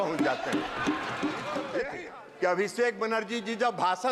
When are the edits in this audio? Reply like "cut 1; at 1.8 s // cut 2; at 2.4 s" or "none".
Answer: cut 1; at 1.9 s